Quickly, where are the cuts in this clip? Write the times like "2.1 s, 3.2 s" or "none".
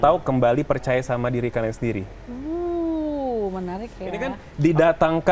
4.4 s